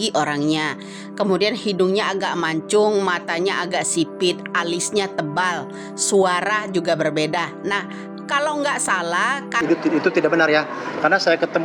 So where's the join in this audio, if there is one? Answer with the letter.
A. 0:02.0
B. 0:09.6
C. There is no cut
B